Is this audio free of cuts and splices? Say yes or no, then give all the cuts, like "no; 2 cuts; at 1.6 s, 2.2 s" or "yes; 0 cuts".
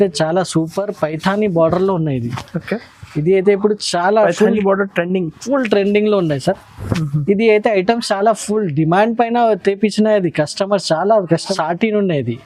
no; 1 cut; at 11.4 s